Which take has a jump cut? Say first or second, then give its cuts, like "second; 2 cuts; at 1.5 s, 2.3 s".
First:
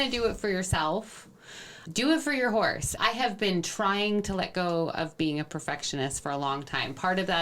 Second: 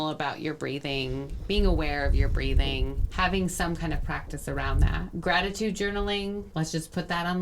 second; 3 cuts; at 3.0 s, 5.1 s, 6.5 s